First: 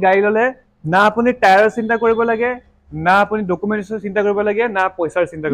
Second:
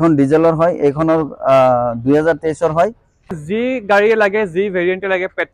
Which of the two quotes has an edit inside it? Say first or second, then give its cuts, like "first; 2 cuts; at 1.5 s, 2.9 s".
second; 1 cut; at 3.4 s